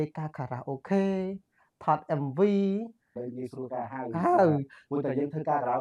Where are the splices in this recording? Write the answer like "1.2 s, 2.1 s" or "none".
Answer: 3.2 s